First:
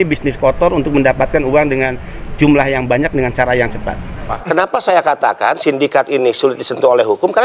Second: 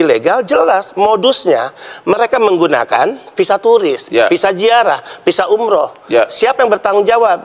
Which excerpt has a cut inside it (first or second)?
first